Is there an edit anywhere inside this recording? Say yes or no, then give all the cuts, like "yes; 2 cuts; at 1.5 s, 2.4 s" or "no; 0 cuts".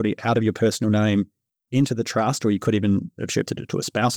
no; 0 cuts